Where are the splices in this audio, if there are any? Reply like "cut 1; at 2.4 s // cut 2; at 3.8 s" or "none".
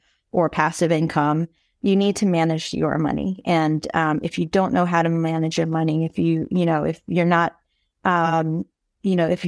none

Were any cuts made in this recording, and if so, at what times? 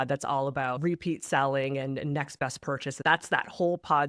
cut 1; at 0.8 s // cut 2; at 3.0 s

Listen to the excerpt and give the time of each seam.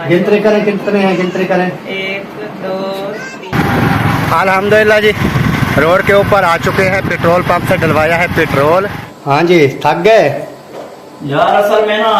cut 1; at 3.3 s // cut 2; at 9.0 s

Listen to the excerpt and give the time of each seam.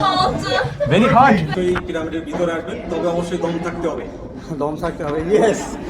cut 1; at 1.5 s

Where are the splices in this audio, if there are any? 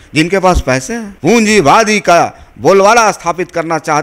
cut 1; at 1.0 s

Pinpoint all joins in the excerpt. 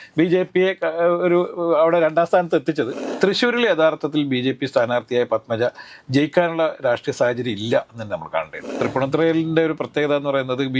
cut 1; at 3.0 s // cut 2; at 8.7 s

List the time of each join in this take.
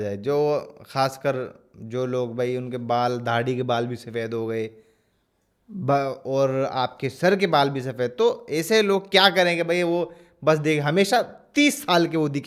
none

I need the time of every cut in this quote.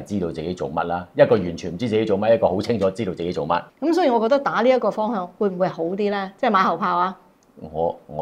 cut 1; at 3.7 s

